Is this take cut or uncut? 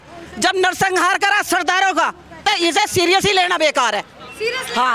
cut